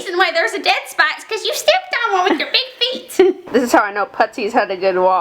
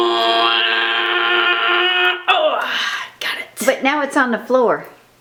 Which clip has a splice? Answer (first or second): first